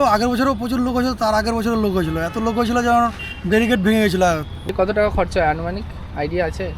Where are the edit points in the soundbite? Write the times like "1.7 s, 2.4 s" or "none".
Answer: 4.7 s